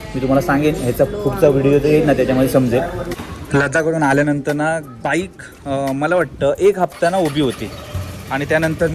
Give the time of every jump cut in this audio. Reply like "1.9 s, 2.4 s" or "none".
3.2 s